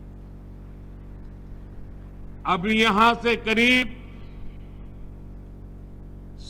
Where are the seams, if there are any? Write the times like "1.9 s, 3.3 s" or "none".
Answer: 2.2 s

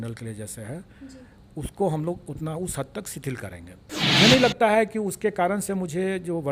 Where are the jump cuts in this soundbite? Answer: 4.0 s

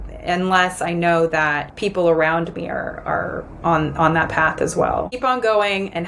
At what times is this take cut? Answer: 1.7 s, 5.1 s

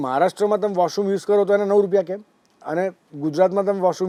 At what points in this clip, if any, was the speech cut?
none

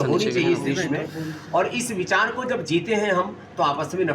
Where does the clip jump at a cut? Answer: none

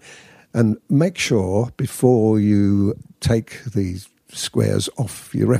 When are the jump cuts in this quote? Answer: 3.1 s

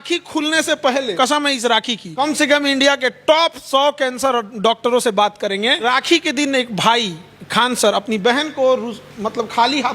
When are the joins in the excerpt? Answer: 1.1 s, 2.1 s, 5.8 s

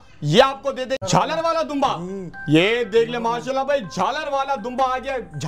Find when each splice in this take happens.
1.0 s

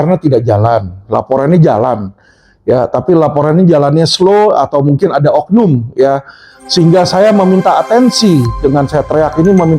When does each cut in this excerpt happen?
none

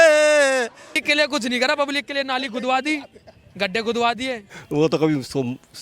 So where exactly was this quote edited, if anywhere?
1.0 s, 4.5 s

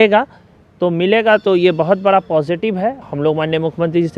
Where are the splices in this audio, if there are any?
3.0 s

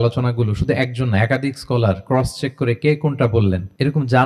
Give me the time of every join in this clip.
none

